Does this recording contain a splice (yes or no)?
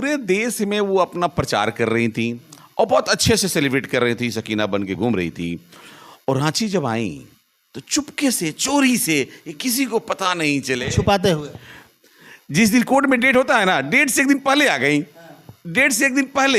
no